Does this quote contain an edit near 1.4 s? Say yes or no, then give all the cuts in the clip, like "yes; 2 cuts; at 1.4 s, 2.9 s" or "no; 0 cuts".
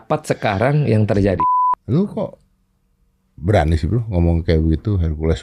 yes; 1 cut; at 1.4 s